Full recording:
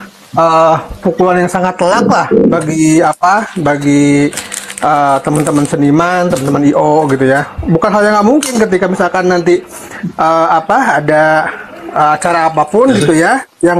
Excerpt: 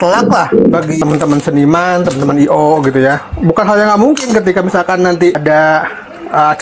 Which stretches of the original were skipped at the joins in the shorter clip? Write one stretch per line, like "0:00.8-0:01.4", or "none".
0:02.8-0:05.2
0:09.6-0:11.0